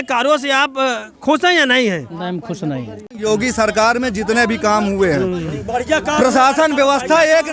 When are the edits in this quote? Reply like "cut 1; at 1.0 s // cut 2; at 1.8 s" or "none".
cut 1; at 3.1 s